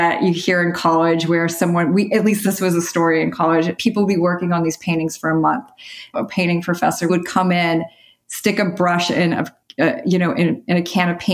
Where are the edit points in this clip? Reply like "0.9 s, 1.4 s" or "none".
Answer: 2.4 s, 3.8 s, 6.1 s, 7.1 s